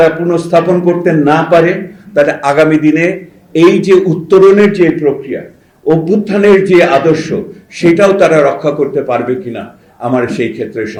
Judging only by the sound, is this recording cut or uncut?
uncut